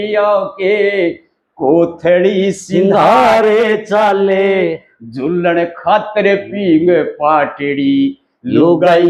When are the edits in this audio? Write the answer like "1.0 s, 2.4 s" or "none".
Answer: none